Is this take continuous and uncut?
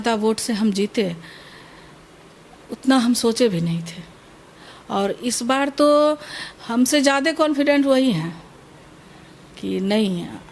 yes; 0 cuts

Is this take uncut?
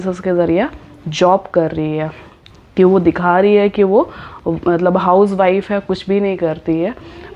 yes; 0 cuts

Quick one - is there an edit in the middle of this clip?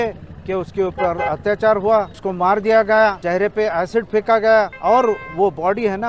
yes; 3 cuts; at 2.2 s, 3.2 s, 4.7 s

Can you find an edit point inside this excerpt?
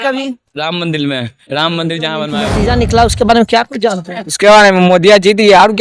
yes; 1 cut; at 2.5 s

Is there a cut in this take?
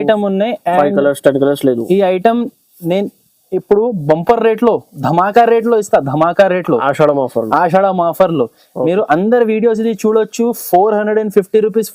no; 0 cuts

